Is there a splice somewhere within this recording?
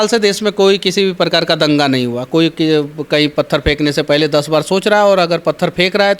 no; 0 cuts

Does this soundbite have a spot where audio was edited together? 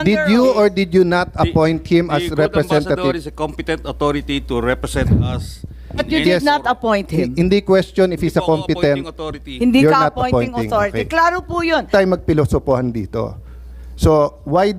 yes; 1 cut; at 11.9 s

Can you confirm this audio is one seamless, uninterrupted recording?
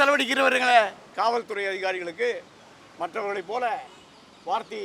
no; 1 cut; at 1.1 s

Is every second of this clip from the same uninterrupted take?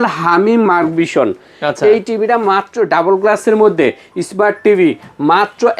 yes; 0 cuts

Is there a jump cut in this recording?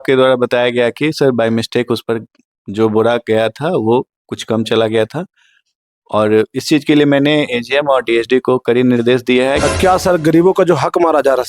yes; 1 cut; at 9.7 s

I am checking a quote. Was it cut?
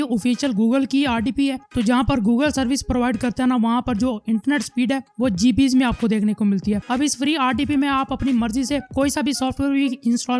yes; 1 cut; at 6.8 s

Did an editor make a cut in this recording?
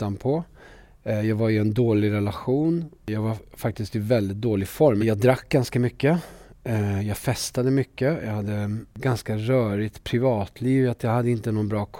yes; 3 cuts; at 3.1 s, 5.0 s, 9.0 s

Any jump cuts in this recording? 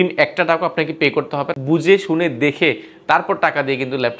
yes; 1 cut; at 1.5 s

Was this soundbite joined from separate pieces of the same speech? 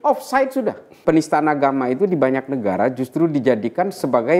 yes; 1 cut; at 1.0 s

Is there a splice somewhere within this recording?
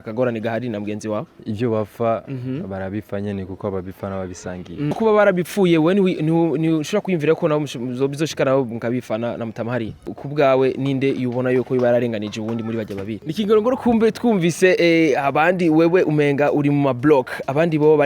yes; 4 cuts; at 1.4 s, 4.9 s, 10.2 s, 13.1 s

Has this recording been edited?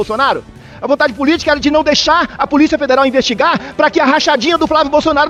no; 0 cuts

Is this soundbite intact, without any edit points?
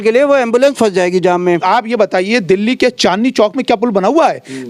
no; 1 cut; at 1.6 s

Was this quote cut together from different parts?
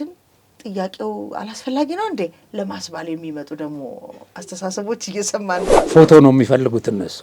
yes; 1 cut; at 5.6 s

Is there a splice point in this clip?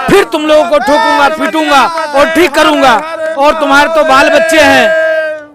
no; 0 cuts

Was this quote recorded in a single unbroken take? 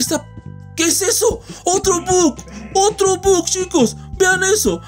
yes; 0 cuts

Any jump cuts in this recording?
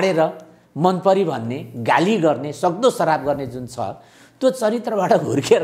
no; 0 cuts

